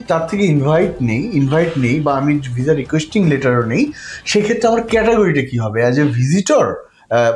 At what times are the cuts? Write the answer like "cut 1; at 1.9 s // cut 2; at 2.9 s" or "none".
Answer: none